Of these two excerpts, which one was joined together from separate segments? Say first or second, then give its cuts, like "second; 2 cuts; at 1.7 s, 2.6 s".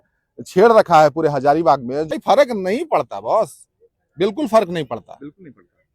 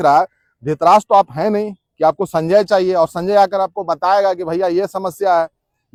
first; 1 cut; at 2.1 s